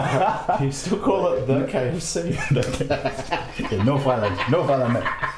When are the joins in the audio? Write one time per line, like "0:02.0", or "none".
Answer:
none